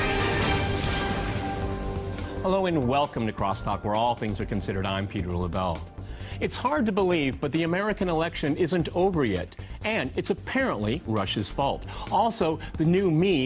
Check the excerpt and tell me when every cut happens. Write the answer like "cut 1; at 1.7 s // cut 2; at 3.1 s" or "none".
cut 1; at 1.6 s

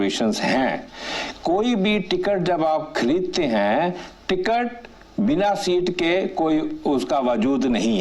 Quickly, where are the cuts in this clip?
none

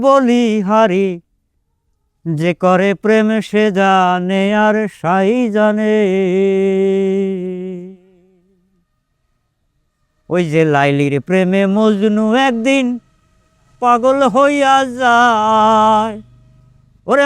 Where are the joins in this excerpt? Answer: none

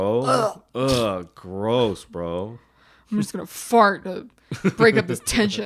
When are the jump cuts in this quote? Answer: none

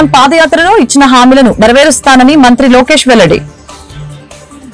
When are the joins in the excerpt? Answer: cut 1; at 3.4 s

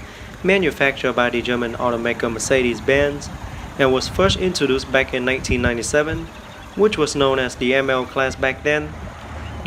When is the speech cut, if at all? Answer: none

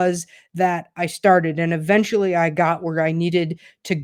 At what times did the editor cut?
none

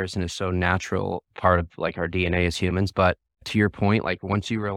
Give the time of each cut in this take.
cut 1; at 3.5 s

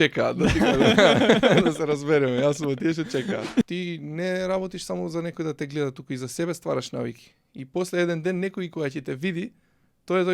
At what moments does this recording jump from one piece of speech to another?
cut 1; at 3.6 s

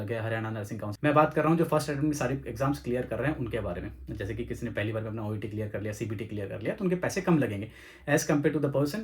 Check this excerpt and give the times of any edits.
cut 1; at 0.9 s

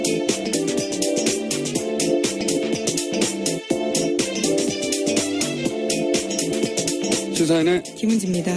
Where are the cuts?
cut 1; at 4.3 s

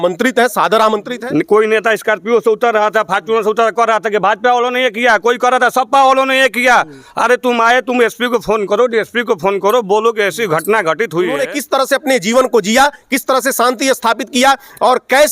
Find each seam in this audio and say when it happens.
cut 1; at 1.1 s // cut 2; at 11.4 s

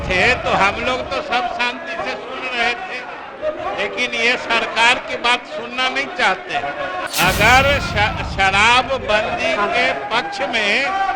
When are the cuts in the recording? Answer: cut 1; at 7.0 s

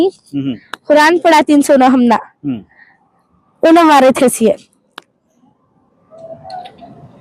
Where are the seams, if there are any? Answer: none

